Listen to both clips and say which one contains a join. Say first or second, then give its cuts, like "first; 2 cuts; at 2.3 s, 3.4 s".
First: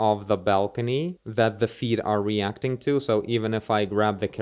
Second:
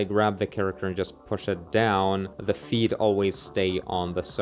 second; 1 cut; at 2.3 s